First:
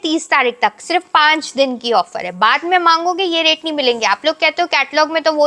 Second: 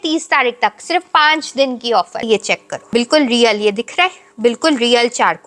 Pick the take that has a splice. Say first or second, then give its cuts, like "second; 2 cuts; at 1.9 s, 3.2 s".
second; 1 cut; at 2.2 s